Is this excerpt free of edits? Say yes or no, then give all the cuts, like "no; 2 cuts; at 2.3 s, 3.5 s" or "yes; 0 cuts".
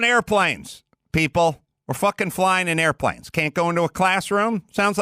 yes; 0 cuts